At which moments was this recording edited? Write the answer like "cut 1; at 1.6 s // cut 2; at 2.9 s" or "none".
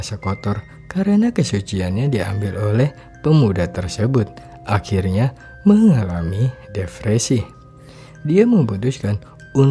none